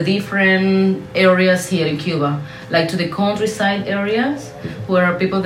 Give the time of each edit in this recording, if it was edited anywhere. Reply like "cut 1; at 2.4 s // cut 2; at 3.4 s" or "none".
none